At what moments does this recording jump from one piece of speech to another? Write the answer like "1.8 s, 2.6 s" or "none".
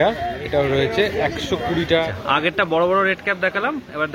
1.8 s